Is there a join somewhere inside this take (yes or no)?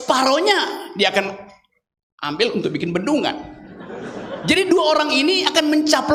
no